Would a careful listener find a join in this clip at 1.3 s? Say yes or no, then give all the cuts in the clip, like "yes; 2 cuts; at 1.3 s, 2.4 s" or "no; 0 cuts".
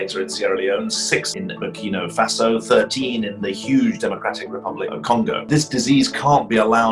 yes; 2 cuts; at 1.3 s, 5.4 s